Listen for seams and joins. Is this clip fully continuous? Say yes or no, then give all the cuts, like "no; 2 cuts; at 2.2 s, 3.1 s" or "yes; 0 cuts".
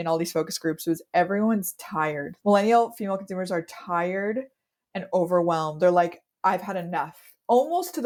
yes; 0 cuts